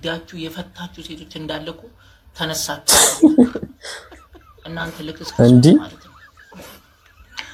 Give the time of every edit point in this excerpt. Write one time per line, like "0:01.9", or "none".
none